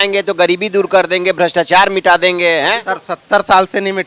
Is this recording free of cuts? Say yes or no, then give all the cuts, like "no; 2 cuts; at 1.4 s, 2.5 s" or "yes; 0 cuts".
yes; 0 cuts